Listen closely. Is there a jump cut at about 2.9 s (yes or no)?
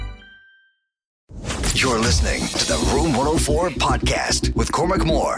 no